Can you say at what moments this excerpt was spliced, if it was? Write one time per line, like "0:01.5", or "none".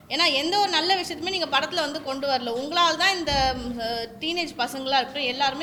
none